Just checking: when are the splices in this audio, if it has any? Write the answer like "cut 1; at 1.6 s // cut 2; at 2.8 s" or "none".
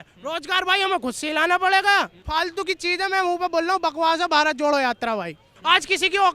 cut 1; at 2.2 s // cut 2; at 5.5 s